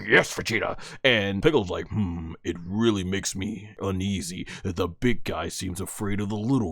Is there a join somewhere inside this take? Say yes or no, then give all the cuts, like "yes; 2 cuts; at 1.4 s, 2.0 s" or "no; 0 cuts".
yes; 2 cuts; at 1.4 s, 3.8 s